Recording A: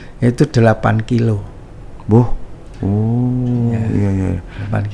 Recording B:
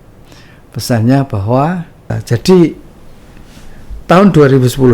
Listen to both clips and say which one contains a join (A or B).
B